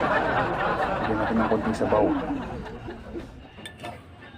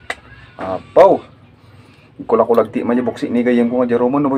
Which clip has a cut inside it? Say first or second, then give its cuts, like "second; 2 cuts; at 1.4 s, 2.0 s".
first; 1 cut; at 1.0 s